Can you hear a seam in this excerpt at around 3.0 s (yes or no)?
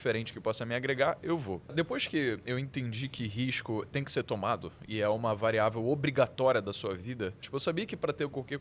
no